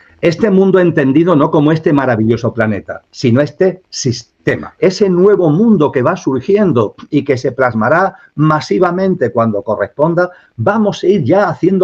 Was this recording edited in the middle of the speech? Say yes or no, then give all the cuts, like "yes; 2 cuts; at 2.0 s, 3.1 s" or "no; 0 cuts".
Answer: yes; 1 cut; at 4.7 s